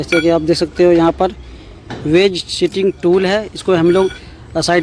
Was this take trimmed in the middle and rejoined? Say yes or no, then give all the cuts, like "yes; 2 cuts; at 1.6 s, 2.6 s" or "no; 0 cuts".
no; 0 cuts